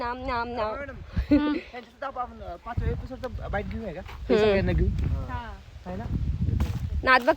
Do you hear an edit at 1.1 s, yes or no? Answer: no